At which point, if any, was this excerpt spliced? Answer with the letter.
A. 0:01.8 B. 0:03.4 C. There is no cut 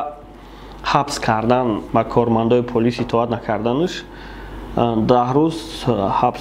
A